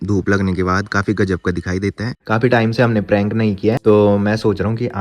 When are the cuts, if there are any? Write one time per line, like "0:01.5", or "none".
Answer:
0:02.2
0:03.8